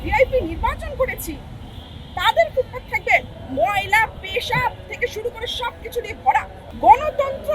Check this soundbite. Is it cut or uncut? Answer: cut